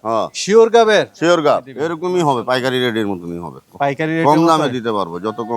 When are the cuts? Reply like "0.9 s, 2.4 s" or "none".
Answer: 1.8 s

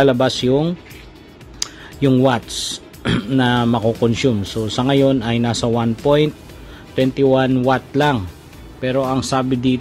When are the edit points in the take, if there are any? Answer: none

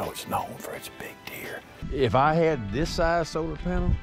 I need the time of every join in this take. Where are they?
1.7 s

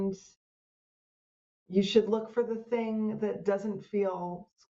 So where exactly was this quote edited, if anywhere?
none

